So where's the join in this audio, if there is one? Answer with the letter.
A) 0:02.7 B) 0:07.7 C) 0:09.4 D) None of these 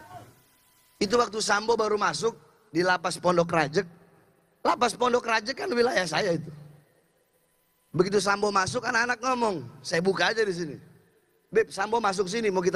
D